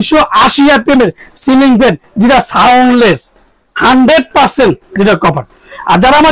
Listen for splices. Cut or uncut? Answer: uncut